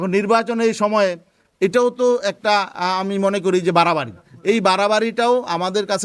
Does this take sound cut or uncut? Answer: uncut